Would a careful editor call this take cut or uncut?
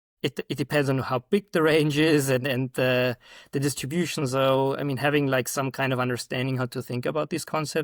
uncut